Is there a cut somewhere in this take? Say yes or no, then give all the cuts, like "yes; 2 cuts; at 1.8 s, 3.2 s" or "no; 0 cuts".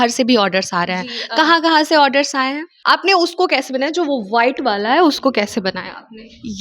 yes; 1 cut; at 2.7 s